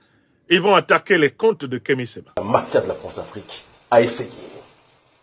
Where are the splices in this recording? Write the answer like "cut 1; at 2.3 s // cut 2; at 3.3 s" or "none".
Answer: cut 1; at 2.4 s